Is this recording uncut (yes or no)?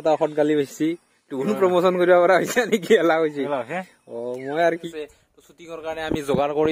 no